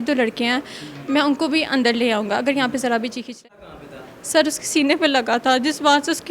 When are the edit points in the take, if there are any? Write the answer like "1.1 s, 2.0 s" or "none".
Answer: 3.5 s